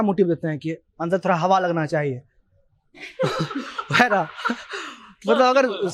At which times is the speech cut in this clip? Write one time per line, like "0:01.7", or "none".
none